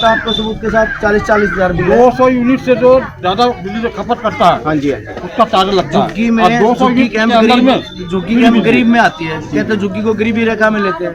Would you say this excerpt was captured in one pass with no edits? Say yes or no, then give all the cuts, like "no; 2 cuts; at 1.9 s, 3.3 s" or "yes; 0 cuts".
yes; 0 cuts